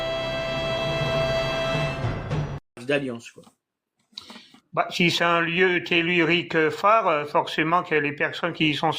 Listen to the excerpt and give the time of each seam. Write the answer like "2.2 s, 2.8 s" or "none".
2.8 s

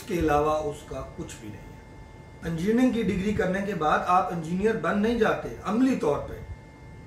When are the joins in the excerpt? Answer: 2.3 s

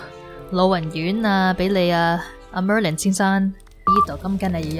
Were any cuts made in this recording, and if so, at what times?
3.9 s

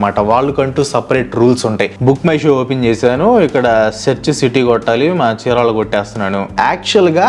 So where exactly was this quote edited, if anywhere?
2.0 s, 6.5 s

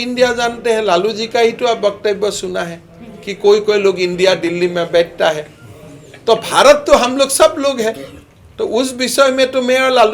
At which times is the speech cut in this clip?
none

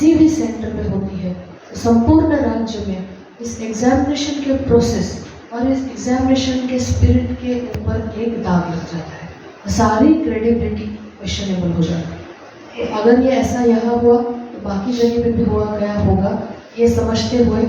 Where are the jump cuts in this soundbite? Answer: none

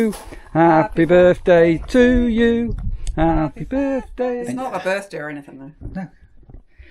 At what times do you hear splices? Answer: 4.4 s

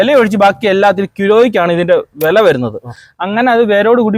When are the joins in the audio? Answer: none

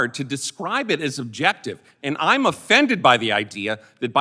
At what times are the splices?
none

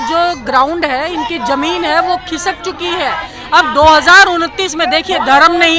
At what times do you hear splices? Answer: none

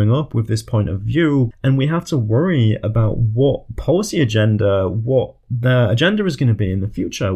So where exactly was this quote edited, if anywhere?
1.5 s, 5.5 s

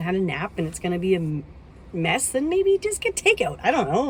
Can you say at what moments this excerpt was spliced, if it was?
none

